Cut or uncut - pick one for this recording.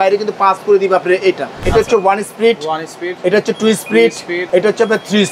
cut